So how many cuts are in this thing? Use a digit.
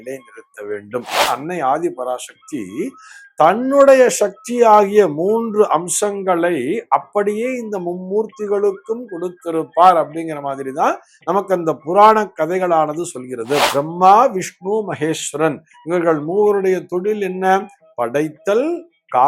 2